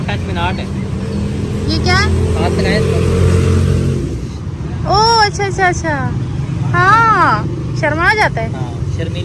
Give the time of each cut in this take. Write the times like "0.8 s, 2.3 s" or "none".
4.2 s